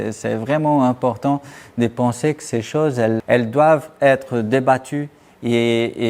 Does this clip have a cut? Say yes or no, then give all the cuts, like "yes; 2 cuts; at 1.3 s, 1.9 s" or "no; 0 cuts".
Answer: no; 0 cuts